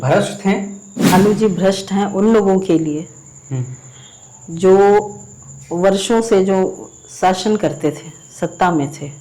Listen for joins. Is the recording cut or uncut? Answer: cut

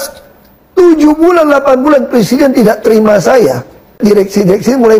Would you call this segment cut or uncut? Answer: cut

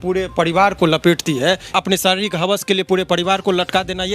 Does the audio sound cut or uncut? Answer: cut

